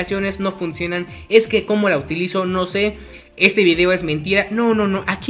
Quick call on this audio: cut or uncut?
uncut